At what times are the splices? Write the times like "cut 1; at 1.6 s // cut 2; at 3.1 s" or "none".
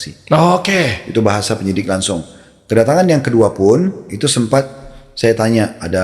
cut 1; at 4.1 s